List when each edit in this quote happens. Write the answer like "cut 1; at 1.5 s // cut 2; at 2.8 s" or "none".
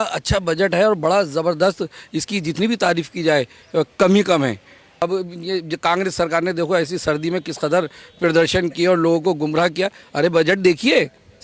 cut 1; at 5.0 s